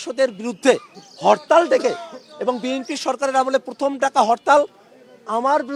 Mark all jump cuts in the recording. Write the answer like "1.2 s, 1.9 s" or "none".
none